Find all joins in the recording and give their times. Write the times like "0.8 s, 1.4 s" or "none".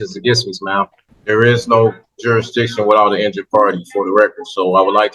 1.1 s